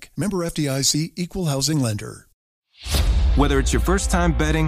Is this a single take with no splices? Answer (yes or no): no